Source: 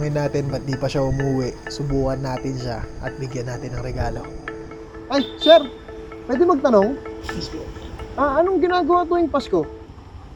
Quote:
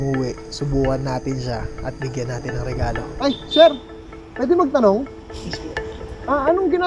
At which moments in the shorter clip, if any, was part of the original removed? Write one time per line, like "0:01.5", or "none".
0:03.1